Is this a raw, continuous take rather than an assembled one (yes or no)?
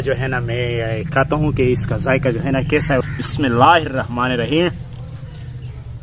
no